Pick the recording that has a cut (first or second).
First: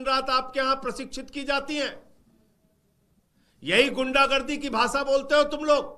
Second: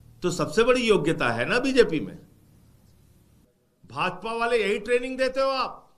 second